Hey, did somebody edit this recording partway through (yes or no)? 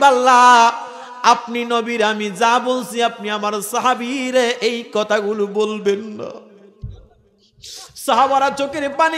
no